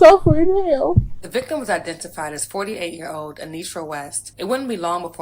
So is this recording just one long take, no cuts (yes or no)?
no